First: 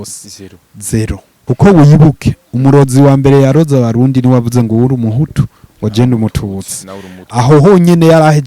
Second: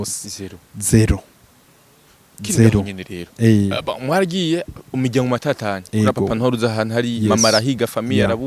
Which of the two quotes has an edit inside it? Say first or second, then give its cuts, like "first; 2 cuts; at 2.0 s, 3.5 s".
first; 1 cut; at 1.3 s